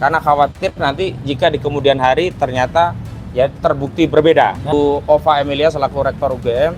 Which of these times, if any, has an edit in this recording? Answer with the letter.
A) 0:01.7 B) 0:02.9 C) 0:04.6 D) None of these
C